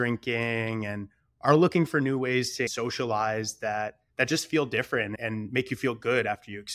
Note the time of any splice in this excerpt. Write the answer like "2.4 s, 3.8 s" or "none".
2.7 s, 4.0 s, 5.2 s